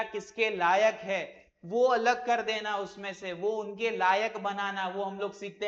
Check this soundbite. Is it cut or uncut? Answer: uncut